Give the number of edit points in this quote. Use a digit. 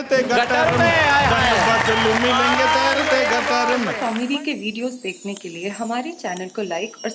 1